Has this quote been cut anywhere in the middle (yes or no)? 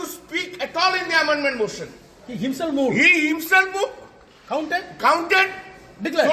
no